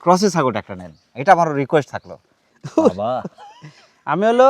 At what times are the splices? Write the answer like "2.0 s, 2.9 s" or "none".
2.4 s